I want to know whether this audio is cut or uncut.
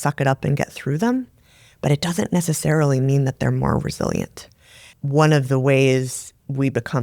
cut